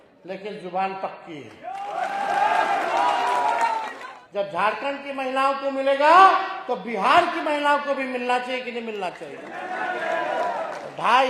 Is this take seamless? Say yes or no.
no